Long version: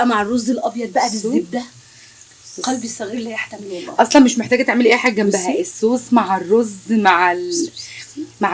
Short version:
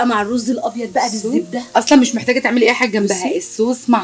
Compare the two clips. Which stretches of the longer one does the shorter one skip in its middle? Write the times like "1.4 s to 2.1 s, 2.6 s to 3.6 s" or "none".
1.7 s to 3.9 s